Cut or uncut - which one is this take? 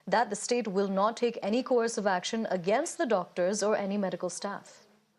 cut